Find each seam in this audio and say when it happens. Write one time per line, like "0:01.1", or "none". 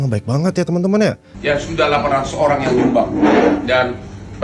0:01.3